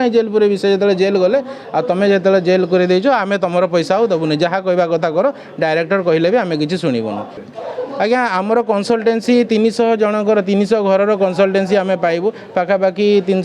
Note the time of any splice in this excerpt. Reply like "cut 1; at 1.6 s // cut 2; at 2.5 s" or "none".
cut 1; at 7.4 s